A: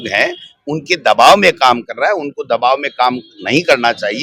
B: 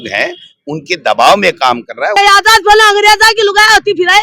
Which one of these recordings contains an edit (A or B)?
B